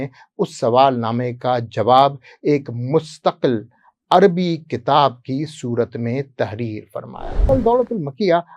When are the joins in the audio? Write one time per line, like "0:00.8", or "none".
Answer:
0:07.5